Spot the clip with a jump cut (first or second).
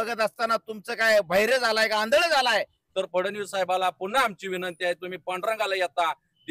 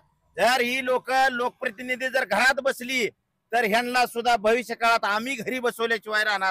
first